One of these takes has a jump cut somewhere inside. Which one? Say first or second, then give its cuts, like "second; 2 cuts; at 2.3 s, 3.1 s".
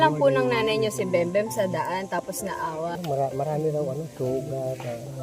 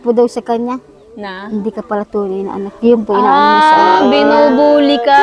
first; 1 cut; at 3.0 s